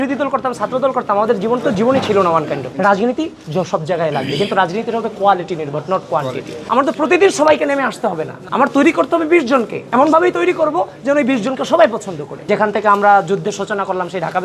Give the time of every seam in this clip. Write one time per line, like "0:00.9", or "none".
0:02.7
0:06.6
0:12.3

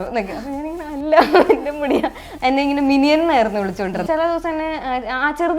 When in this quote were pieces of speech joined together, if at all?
0:02.2
0:04.0

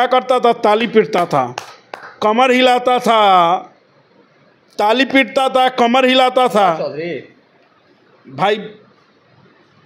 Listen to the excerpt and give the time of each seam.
none

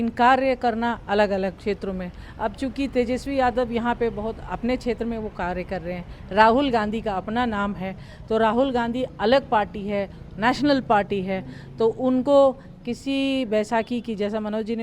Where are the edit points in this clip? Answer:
none

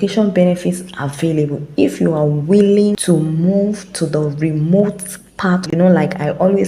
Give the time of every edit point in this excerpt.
0:03.0
0:05.6

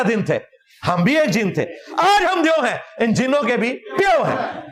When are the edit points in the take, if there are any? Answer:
none

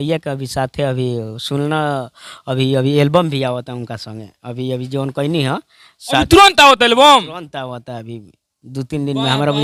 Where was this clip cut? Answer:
none

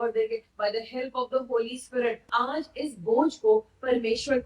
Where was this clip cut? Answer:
0:02.3

